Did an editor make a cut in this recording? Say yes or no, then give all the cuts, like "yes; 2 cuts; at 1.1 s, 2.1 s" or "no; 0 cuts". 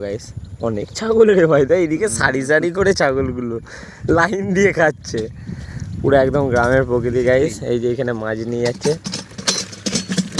no; 0 cuts